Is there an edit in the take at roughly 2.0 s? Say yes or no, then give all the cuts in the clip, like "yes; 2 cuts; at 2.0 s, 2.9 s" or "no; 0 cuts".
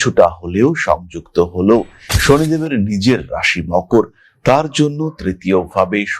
yes; 1 cut; at 2.0 s